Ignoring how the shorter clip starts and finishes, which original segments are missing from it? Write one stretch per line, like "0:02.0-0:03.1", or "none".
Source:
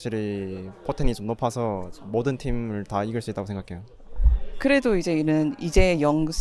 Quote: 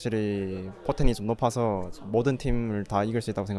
none